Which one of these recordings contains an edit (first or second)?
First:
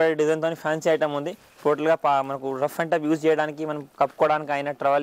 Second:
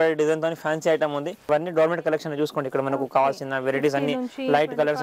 second